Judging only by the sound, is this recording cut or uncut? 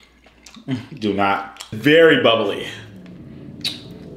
cut